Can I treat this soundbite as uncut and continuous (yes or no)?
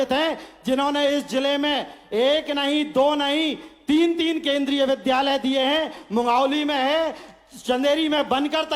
yes